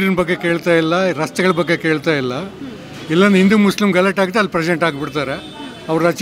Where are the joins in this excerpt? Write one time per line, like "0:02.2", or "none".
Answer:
none